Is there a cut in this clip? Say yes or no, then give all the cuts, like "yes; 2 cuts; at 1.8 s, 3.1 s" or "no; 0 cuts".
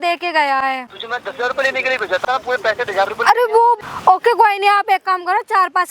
yes; 3 cuts; at 0.9 s, 2.2 s, 3.8 s